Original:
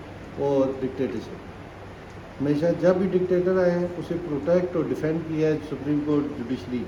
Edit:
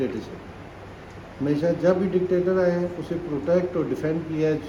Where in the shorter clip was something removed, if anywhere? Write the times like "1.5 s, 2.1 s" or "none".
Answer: none